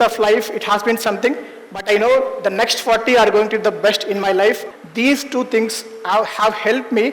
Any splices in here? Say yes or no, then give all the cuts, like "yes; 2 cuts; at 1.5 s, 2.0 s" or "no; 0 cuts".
yes; 1 cut; at 4.7 s